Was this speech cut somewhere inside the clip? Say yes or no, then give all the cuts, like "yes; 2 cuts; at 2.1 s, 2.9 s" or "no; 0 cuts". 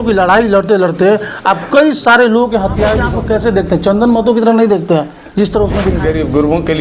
yes; 2 cuts; at 3.1 s, 5.9 s